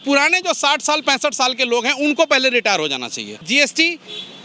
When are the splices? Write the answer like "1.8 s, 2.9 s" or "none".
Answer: 3.5 s

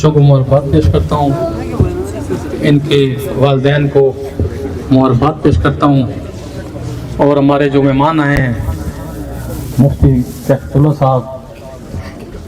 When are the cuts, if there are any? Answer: none

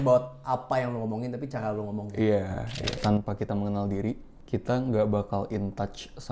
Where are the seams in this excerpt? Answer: 3.0 s, 4.3 s

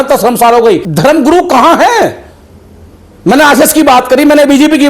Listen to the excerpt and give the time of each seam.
0.9 s

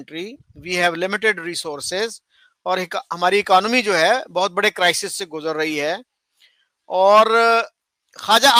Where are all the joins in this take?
none

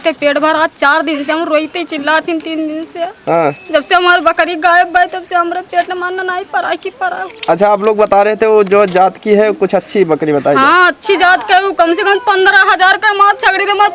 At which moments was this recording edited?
none

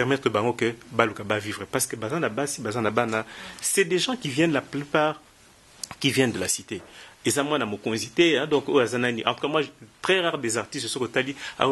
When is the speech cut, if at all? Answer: none

